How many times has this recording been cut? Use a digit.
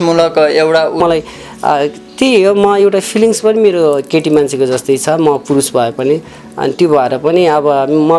1